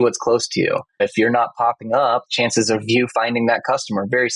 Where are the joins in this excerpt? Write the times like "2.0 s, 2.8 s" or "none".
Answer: 1.0 s, 2.3 s